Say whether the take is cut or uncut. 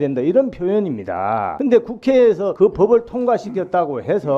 uncut